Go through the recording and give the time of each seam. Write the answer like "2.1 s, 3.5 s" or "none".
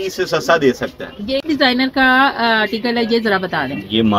1.4 s